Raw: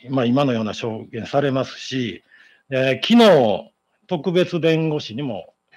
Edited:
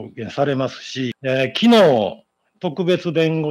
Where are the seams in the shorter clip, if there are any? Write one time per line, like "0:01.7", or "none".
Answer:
0:01.2